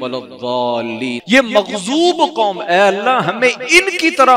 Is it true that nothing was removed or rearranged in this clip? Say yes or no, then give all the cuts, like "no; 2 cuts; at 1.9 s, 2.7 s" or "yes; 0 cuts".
no; 1 cut; at 1.2 s